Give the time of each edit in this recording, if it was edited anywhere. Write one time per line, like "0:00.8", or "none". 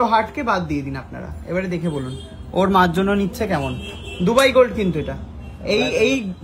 none